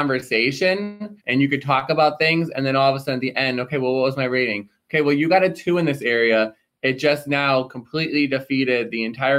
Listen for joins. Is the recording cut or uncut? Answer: cut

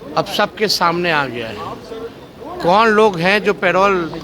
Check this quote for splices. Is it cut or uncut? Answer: uncut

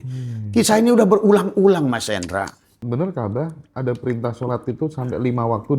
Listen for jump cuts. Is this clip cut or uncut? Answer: cut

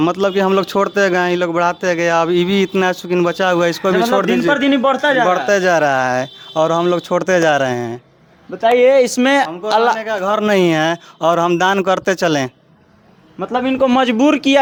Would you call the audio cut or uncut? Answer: uncut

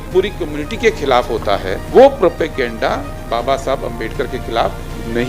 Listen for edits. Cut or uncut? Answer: cut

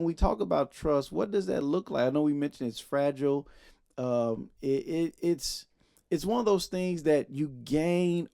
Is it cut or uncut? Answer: uncut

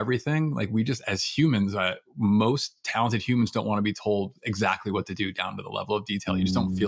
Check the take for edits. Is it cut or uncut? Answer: uncut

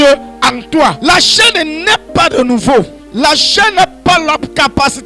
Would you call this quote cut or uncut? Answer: cut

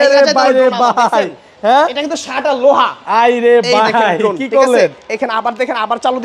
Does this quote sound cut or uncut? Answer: uncut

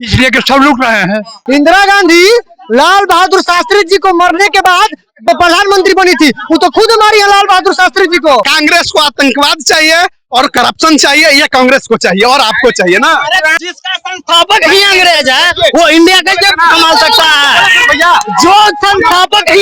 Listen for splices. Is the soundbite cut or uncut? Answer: cut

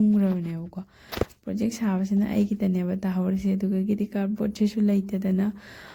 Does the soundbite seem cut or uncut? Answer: uncut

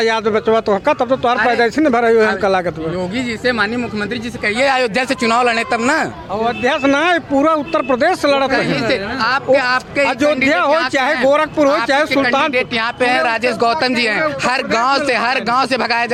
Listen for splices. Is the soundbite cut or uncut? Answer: uncut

